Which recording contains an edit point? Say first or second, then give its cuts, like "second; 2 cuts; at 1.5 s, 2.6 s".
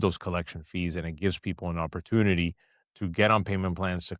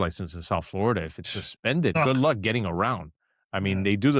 second; 1 cut; at 1.9 s